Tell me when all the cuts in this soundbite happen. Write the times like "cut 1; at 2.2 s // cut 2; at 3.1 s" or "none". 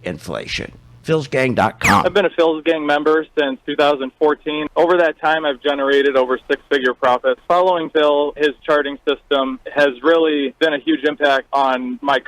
cut 1; at 2.0 s